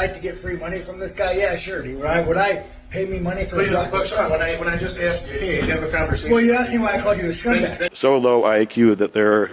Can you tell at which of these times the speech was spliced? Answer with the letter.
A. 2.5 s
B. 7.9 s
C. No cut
B